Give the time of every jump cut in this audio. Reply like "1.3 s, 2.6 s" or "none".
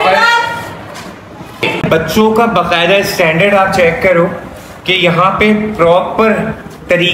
1.6 s